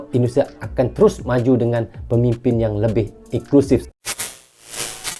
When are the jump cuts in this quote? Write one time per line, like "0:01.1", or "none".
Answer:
0:03.9